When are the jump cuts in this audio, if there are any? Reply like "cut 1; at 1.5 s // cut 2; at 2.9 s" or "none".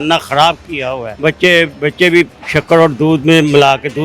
cut 1; at 1.0 s